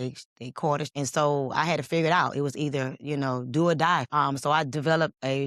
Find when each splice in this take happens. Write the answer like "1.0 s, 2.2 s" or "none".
0.9 s, 4.1 s

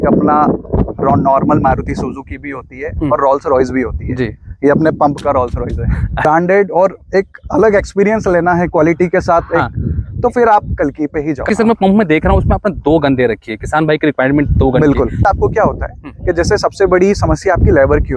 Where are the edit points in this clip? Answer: 6.2 s, 11.4 s, 15.2 s

